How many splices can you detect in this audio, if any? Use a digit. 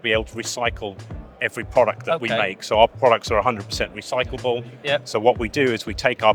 0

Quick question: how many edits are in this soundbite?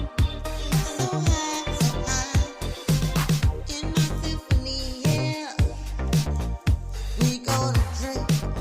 1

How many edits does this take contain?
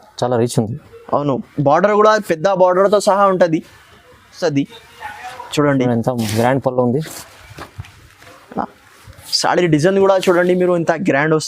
1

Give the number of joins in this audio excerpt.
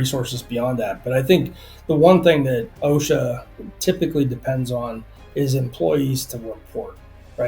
1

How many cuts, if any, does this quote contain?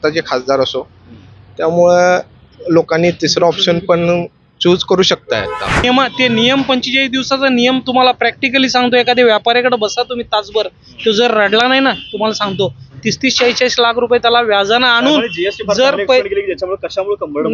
1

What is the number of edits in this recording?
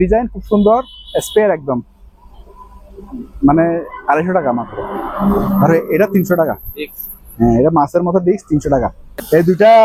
0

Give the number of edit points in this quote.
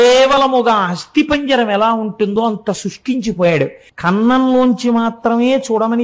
1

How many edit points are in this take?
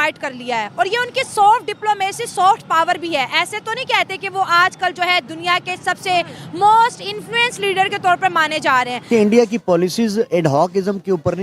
1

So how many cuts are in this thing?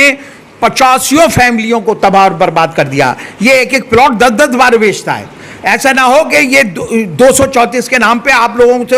0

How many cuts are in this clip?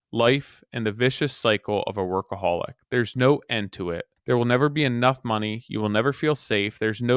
1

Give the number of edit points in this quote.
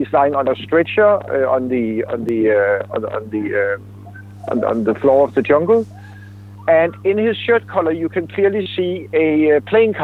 0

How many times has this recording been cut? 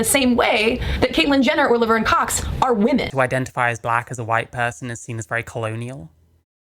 1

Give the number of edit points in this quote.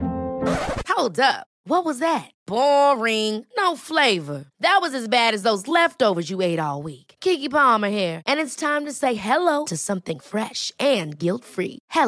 0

